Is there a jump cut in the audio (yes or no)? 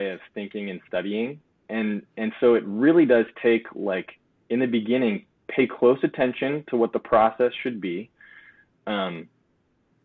no